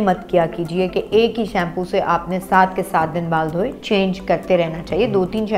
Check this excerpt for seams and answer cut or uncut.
uncut